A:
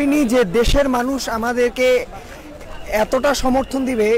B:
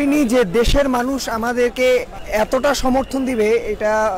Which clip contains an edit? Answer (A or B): B